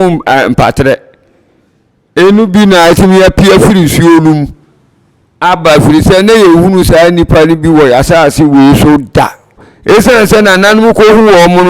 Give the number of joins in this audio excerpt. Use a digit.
1